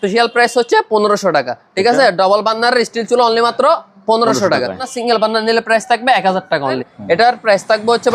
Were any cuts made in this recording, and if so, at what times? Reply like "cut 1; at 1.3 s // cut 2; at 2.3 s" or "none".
cut 1; at 4.9 s // cut 2; at 6.9 s